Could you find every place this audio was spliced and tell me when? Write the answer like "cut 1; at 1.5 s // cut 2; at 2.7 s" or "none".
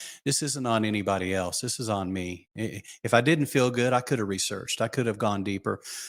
none